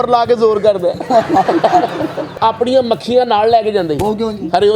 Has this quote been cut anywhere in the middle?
yes; 1 cut; at 2.3 s

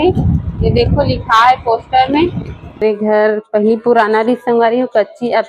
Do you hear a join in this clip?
yes; 1 cut; at 2.8 s

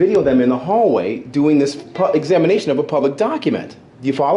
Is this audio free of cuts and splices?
yes; 0 cuts

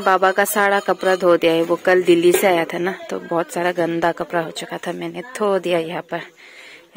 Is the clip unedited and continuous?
yes; 0 cuts

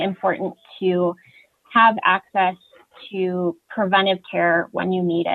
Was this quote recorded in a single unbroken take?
yes; 0 cuts

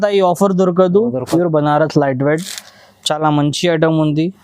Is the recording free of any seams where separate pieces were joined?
no; 1 cut; at 1.2 s

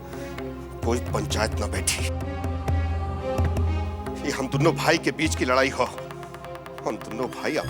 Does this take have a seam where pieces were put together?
no; 0 cuts

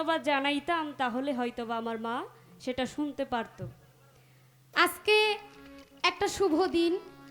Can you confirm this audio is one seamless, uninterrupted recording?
no; 1 cut; at 4.7 s

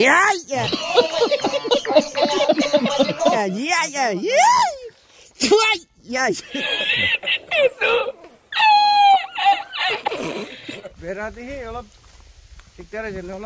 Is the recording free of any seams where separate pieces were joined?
yes; 0 cuts

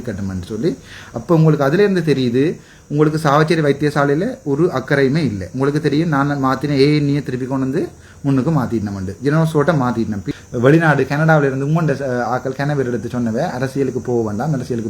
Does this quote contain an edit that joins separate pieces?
yes; 1 cut; at 10.2 s

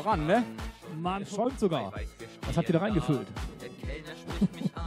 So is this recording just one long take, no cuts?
no; 1 cut; at 1.0 s

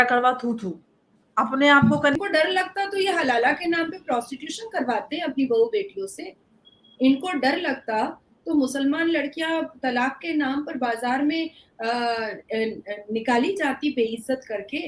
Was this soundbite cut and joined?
yes; 1 cut; at 2.2 s

